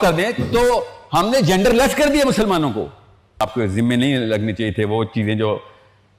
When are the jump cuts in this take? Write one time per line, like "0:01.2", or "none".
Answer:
0:03.4